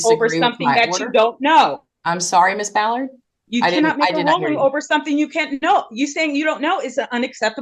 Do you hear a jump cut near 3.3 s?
no; 0 cuts

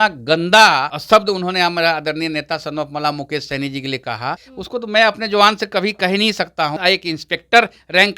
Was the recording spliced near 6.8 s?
yes; 3 cuts; at 0.9 s, 4.5 s, 6.8 s

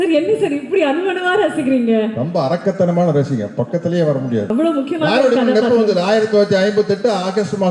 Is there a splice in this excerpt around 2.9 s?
no; 1 cut; at 4.5 s

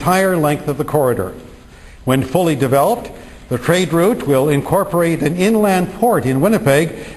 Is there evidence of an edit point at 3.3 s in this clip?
no; 1 cut; at 1.7 s

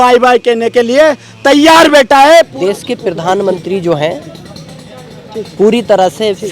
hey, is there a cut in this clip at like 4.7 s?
no; 1 cut; at 2.5 s

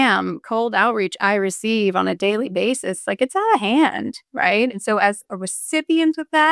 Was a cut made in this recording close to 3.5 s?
no; 1 cut; at 4.7 s

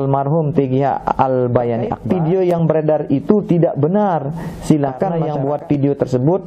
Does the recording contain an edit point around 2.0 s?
yes; 2 cuts; at 2.0 s, 5.2 s

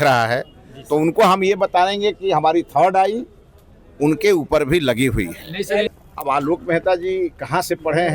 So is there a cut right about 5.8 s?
yes; 1 cut; at 5.8 s

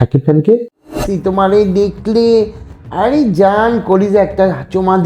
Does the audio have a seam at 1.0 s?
yes; 1 cut; at 1.0 s

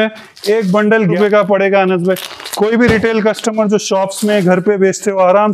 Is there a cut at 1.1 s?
yes; 1 cut; at 1.1 s

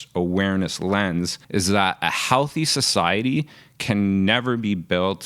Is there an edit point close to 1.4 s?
yes; 1 cut; at 1.4 s

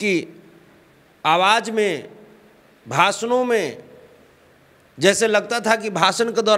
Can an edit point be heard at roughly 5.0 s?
no; 0 cuts

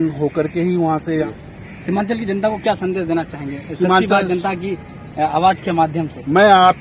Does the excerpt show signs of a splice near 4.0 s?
no; 1 cut; at 1.3 s

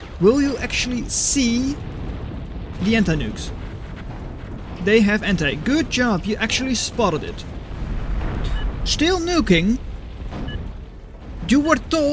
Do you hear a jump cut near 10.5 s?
no; 2 cuts; at 4.6 s, 7.8 s

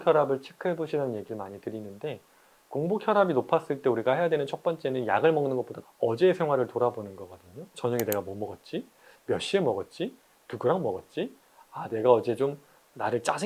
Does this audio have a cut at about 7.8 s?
yes; 2 cuts; at 5.8 s, 7.8 s

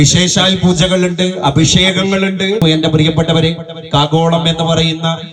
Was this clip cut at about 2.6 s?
yes; 1 cut; at 2.6 s

